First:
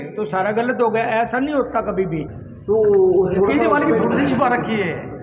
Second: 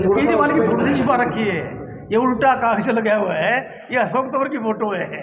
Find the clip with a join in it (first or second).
first